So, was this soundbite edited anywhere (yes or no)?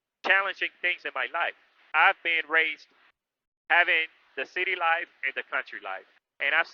yes